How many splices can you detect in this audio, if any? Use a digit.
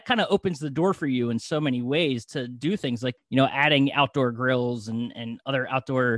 1